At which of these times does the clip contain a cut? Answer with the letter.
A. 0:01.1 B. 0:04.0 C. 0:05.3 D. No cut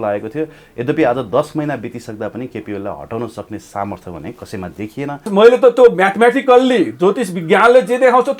C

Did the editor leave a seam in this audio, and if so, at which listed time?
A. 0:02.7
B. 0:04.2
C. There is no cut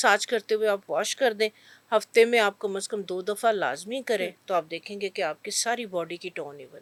C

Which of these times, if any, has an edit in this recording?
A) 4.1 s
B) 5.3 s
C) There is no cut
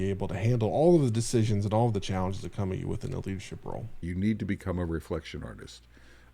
A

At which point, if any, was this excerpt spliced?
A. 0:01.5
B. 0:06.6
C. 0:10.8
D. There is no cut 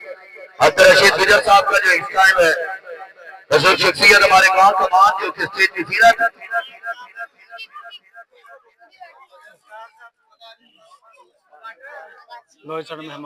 D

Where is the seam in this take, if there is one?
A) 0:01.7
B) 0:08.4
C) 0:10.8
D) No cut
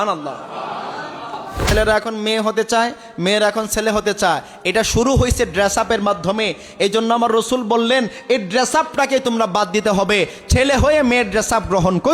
A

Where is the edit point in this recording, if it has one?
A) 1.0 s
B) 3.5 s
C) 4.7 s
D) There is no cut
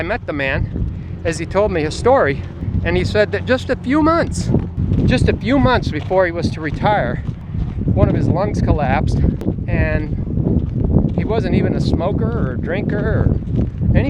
C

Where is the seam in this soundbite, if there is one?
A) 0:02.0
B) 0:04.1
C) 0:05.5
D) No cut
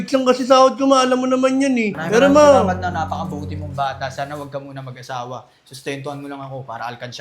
A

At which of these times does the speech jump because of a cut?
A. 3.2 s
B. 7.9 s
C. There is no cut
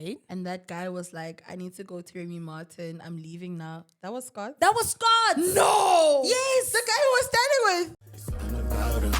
B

